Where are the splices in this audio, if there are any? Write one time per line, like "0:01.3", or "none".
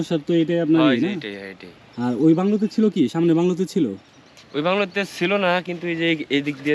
none

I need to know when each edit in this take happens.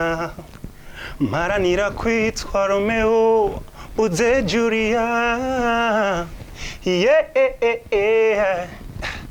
none

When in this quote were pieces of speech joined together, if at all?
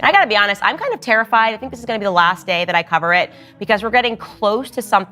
none

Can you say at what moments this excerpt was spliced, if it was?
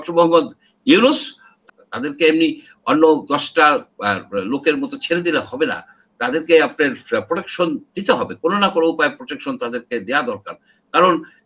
0:01.6

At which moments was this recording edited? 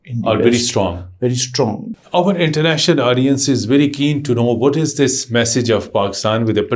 0:01.9

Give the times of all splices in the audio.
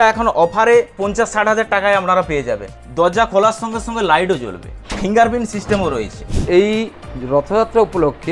0:01.0
0:02.7
0:04.7
0:06.4

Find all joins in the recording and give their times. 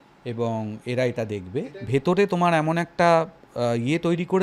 0:01.6

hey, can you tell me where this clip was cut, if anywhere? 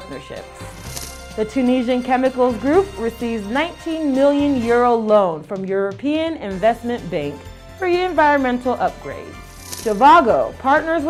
none

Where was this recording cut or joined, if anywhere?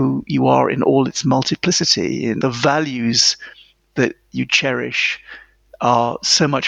0:02.4

